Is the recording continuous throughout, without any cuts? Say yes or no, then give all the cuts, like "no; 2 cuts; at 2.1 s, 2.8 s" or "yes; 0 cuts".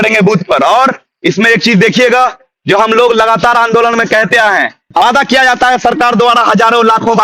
no; 1 cut; at 5.0 s